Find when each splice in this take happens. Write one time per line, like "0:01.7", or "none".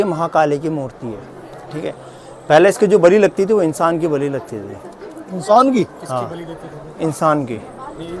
none